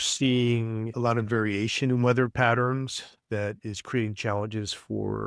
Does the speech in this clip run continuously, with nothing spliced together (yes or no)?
yes